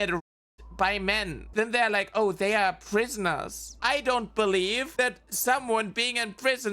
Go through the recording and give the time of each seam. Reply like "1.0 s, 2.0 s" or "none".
1.4 s, 4.8 s

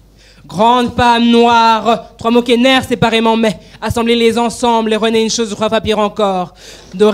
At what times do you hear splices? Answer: none

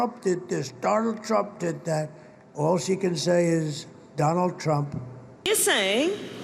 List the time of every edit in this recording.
5.4 s

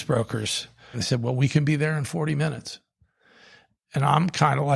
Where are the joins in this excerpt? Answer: 1.0 s

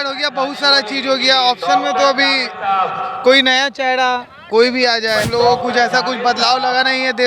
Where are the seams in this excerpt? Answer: 5.3 s

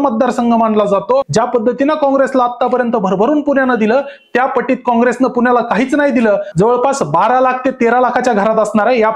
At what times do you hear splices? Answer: 1.3 s, 6.5 s

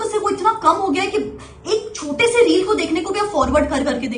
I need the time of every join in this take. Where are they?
none

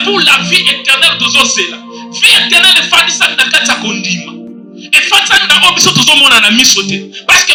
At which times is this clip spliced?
none

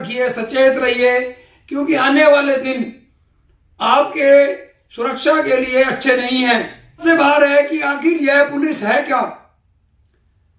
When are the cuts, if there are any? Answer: 7.0 s

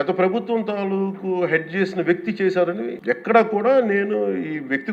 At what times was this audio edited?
2.9 s

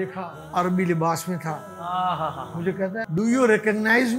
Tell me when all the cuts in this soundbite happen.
3.1 s

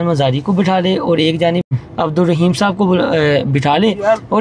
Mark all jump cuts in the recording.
1.8 s

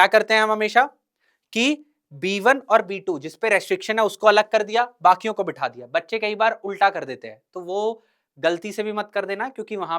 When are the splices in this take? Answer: none

